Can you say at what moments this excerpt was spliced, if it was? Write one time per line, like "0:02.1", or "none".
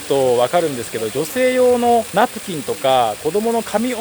none